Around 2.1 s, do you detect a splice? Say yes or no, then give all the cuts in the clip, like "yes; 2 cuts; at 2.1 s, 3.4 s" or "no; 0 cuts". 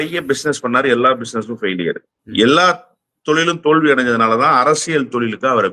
yes; 1 cut; at 2.1 s